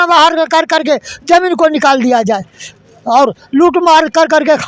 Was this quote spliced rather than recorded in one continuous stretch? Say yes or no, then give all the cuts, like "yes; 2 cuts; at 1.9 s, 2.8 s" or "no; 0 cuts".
no; 0 cuts